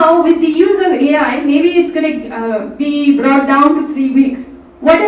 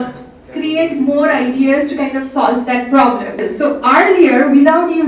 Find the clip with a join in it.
second; 1 cut; at 3.5 s

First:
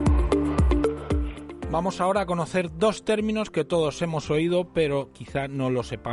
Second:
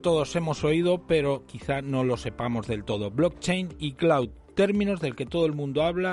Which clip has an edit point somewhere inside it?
second; 1 cut; at 3.4 s

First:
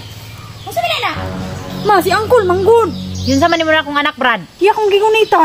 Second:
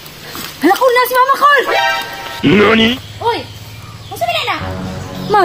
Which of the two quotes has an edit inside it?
first; 1 cut; at 4.4 s

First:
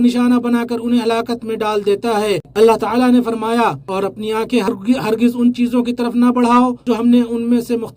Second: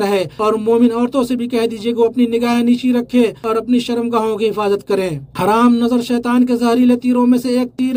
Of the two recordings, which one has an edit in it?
first; 2 cuts; at 2.5 s, 4.7 s

